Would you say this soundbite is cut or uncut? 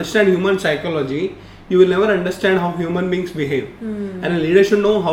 uncut